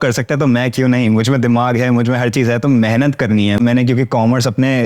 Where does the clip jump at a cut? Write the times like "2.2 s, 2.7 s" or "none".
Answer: 3.6 s